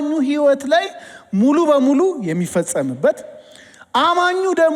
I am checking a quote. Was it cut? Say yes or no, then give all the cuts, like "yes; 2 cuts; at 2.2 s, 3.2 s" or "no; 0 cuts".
no; 0 cuts